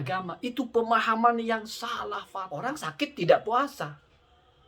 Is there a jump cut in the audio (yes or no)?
yes